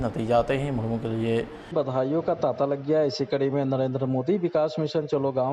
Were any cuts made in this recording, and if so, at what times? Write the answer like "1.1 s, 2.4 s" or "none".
1.7 s